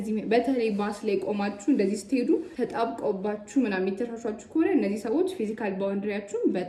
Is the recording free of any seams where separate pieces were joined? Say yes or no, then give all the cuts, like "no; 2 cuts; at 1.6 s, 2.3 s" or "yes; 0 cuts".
yes; 0 cuts